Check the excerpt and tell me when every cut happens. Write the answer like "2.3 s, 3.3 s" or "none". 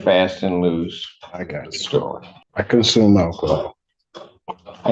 2.4 s